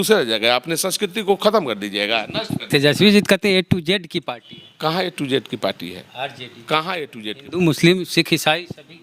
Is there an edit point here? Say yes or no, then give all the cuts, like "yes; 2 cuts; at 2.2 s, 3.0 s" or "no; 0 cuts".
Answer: no; 0 cuts